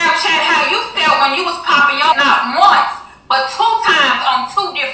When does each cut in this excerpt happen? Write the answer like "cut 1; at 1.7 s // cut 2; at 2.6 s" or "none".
cut 1; at 2.1 s